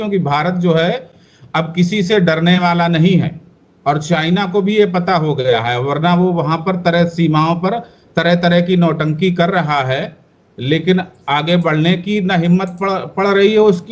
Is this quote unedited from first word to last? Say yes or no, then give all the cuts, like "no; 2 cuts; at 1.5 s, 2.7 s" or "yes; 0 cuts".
yes; 0 cuts